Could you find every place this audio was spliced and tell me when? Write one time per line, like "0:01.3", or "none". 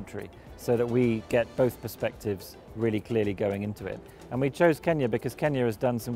none